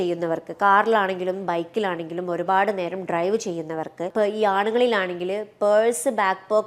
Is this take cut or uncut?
cut